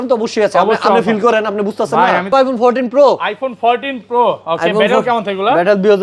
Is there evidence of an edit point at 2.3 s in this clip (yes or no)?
yes